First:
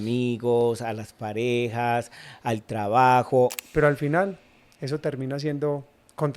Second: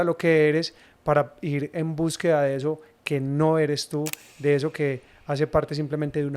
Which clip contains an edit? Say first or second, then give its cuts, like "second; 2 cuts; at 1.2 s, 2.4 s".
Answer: first; 1 cut; at 3.6 s